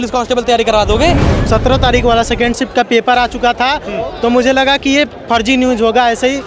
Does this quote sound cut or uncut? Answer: cut